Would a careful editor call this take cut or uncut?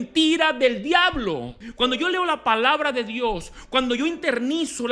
cut